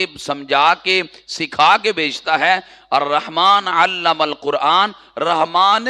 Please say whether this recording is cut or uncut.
uncut